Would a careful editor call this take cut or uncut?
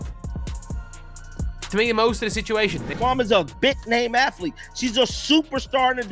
cut